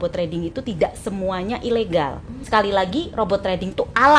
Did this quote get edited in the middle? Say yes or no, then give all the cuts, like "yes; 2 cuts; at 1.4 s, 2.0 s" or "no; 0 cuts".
yes; 1 cut; at 2.3 s